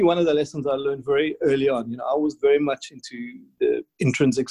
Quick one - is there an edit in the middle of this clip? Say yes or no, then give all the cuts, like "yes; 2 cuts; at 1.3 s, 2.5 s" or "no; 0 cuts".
yes; 1 cut; at 3.5 s